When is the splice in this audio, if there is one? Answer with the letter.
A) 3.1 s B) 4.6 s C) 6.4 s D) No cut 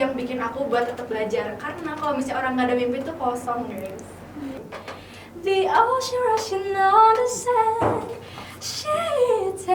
B